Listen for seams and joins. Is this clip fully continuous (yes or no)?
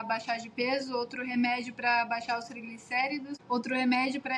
no